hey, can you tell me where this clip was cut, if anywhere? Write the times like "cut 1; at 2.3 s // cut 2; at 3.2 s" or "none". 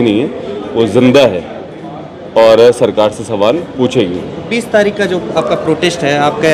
none